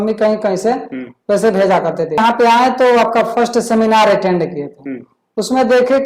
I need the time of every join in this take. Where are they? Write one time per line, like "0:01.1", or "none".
0:02.2